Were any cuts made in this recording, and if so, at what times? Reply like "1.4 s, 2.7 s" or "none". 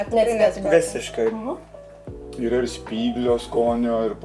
none